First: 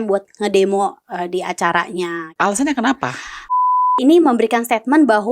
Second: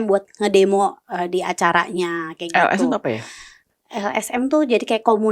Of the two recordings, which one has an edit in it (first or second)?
first